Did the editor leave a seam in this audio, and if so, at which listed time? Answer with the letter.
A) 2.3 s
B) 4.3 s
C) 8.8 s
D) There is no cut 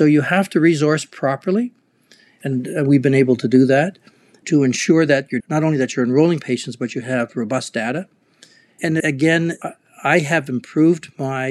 A